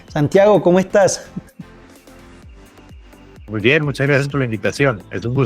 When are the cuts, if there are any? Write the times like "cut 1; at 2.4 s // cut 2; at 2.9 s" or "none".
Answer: cut 1; at 3.4 s